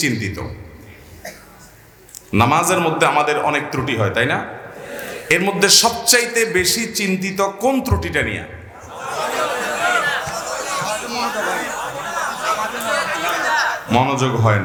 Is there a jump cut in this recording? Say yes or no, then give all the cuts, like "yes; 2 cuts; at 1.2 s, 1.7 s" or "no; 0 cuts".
no; 0 cuts